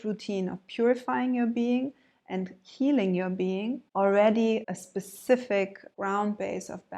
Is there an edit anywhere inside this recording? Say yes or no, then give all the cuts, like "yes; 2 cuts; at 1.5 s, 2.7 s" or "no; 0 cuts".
yes; 3 cuts; at 3.8 s, 4.6 s, 5.9 s